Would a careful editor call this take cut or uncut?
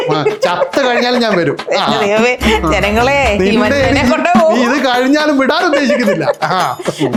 uncut